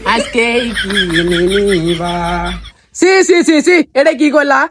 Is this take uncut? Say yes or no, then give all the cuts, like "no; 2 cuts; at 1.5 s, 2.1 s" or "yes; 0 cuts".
no; 1 cut; at 2.6 s